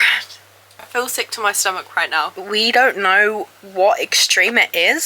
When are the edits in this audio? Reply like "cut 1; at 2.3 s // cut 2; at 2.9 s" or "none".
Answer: cut 1; at 0.9 s // cut 2; at 2.3 s